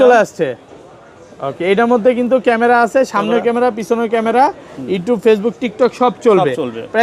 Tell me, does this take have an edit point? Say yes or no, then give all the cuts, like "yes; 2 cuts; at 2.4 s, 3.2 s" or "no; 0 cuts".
no; 0 cuts